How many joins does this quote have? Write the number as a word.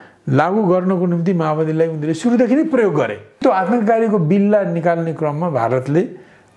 one